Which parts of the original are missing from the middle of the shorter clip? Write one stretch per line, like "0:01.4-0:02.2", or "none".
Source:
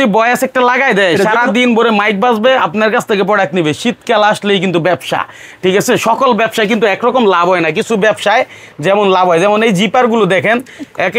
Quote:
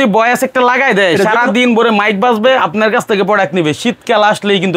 none